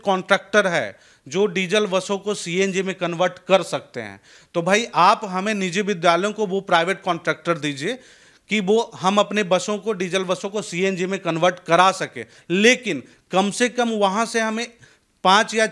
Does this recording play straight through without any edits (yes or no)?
yes